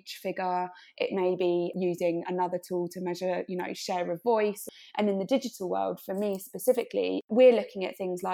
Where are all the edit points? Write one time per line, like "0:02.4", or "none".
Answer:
0:01.7
0:04.6
0:07.2